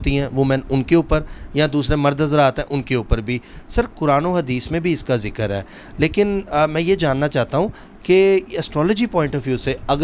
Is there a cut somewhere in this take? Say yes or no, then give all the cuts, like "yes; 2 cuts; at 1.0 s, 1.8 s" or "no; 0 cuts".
no; 0 cuts